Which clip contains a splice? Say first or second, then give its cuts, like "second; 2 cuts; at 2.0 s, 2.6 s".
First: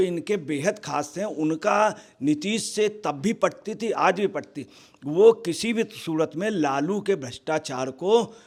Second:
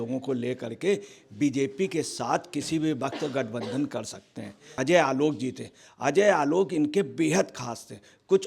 second; 1 cut; at 4.8 s